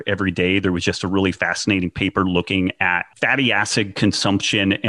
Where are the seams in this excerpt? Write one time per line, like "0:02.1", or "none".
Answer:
0:03.1